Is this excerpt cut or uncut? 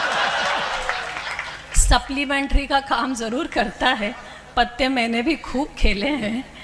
uncut